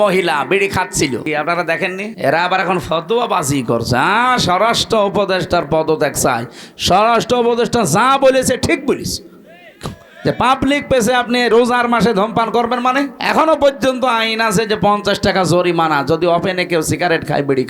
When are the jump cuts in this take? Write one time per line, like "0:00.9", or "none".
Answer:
0:01.2
0:02.1
0:13.2